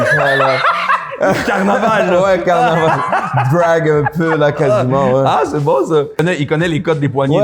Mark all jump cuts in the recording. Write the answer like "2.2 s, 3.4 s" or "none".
6.2 s